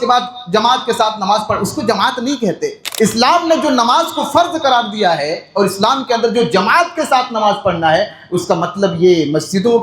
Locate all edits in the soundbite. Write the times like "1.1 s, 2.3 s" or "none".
2.8 s